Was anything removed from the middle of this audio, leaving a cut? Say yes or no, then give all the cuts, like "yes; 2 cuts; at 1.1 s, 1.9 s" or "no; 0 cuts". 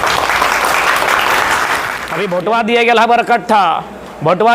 yes; 1 cut; at 2.0 s